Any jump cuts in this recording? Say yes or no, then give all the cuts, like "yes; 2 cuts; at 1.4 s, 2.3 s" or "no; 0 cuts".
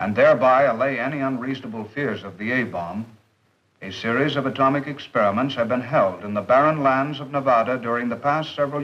yes; 1 cut; at 6.3 s